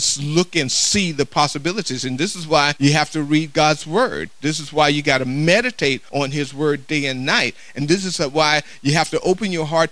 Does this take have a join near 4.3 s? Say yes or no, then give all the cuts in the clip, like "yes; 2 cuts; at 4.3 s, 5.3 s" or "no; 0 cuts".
no; 2 cuts; at 2.7 s, 6.0 s